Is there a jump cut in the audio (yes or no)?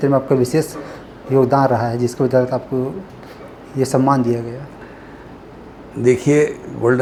no